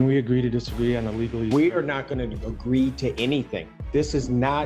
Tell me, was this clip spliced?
no; 0 cuts

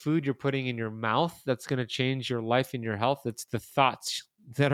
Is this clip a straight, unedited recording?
yes; 0 cuts

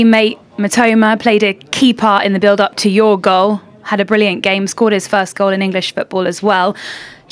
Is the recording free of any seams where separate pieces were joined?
yes; 0 cuts

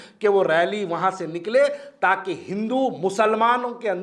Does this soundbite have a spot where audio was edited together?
no; 0 cuts

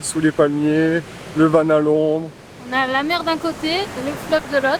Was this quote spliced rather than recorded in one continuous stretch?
no; 0 cuts

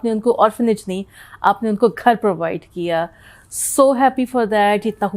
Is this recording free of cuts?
yes; 0 cuts

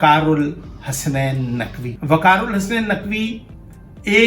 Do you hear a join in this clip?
yes; 1 cut; at 1.9 s

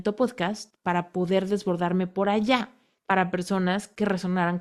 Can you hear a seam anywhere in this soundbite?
no; 0 cuts

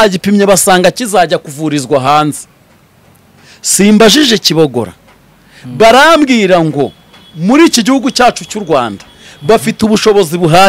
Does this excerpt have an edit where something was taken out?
no; 0 cuts

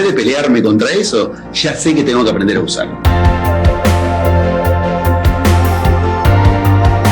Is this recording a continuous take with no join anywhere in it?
no; 1 cut; at 2.9 s

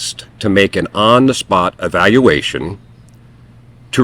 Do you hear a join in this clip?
yes; 1 cut; at 1.8 s

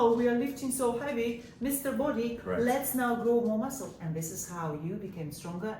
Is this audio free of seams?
yes; 0 cuts

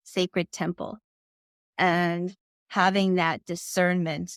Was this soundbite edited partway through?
no; 0 cuts

